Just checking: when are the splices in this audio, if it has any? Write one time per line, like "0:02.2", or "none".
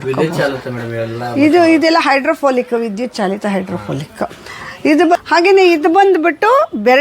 0:05.2